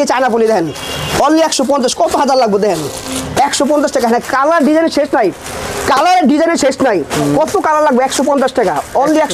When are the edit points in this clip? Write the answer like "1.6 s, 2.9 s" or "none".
none

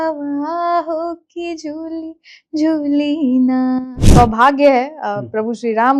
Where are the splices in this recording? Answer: 4.0 s

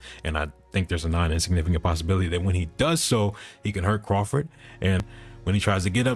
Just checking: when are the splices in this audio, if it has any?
5.0 s

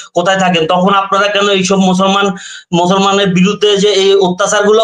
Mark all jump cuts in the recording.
none

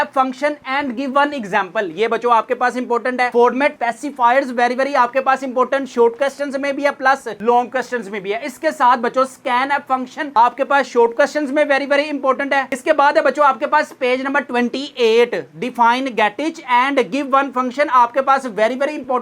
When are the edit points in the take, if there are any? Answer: none

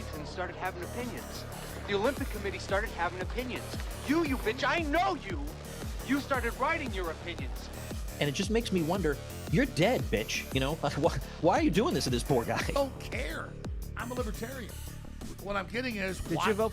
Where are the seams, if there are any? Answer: 4.5 s

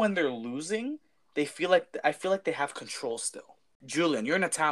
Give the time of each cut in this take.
3.7 s

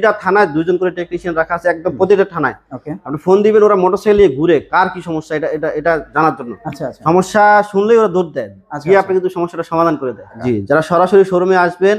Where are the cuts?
10.4 s

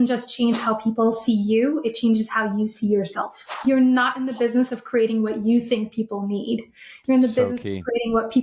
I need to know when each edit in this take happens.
3.6 s

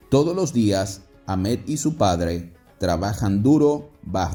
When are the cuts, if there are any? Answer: none

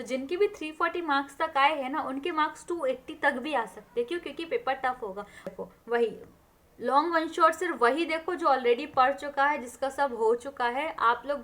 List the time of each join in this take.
5.5 s

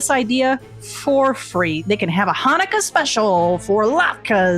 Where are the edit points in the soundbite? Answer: 1.8 s

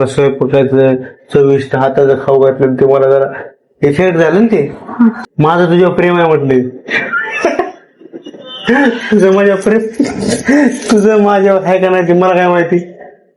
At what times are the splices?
5.2 s

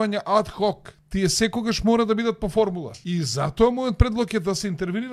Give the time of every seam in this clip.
0.9 s, 2.9 s

